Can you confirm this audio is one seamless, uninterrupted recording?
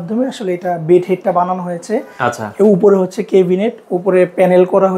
yes; 0 cuts

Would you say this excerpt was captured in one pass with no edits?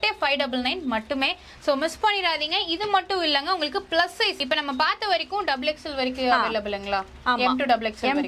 yes; 0 cuts

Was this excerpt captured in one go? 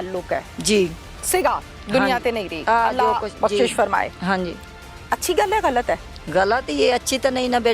yes; 0 cuts

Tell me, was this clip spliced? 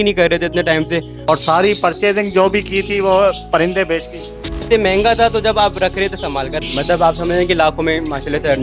yes; 3 cuts; at 1.1 s, 4.6 s, 6.5 s

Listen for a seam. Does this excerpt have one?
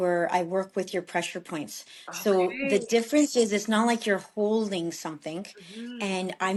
no; 0 cuts

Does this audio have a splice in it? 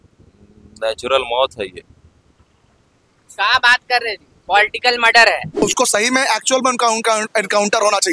yes; 1 cut; at 5.6 s

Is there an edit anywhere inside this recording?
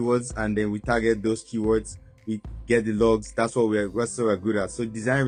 no; 0 cuts

